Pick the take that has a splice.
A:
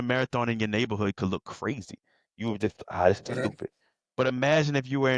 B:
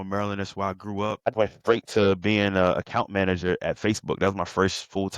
B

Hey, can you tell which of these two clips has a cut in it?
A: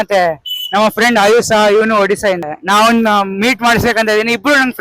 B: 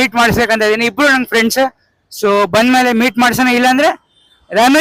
A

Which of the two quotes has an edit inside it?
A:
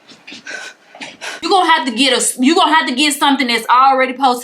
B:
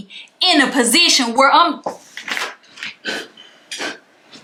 A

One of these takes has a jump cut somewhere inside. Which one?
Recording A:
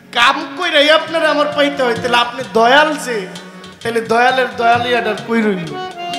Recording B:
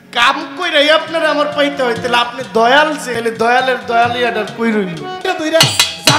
B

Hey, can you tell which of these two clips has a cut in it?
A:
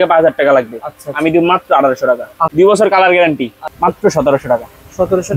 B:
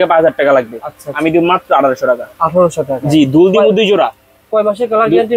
A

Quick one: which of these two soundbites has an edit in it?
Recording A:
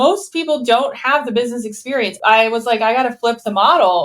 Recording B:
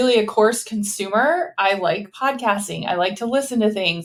A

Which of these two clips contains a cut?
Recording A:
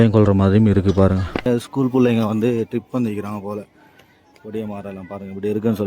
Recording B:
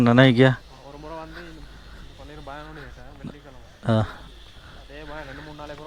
A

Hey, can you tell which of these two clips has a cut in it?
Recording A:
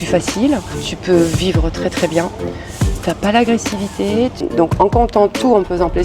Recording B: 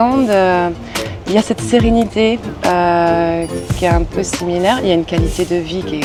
A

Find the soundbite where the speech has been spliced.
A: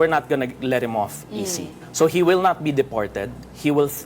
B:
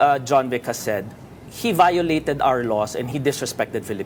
A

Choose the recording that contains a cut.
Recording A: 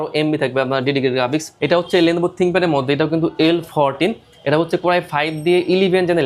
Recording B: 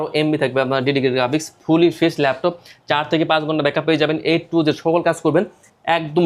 A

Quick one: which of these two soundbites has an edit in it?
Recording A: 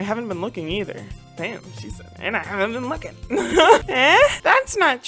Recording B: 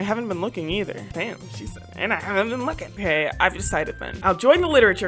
B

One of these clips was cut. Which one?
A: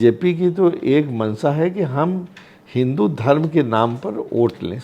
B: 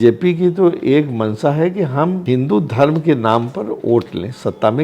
B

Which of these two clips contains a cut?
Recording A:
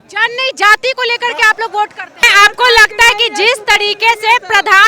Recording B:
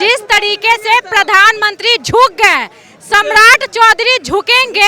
A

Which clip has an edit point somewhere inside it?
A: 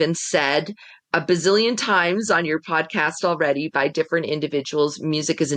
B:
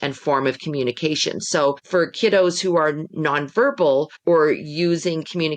B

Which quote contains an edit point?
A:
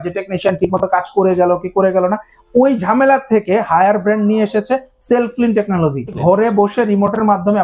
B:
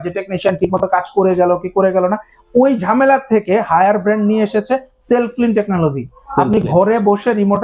A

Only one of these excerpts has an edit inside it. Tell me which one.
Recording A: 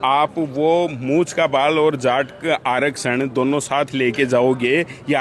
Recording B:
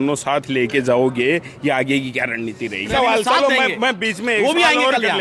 B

